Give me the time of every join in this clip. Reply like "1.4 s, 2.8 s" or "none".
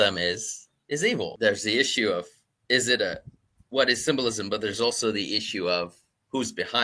1.3 s